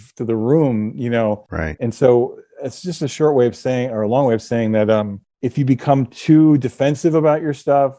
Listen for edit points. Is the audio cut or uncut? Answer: uncut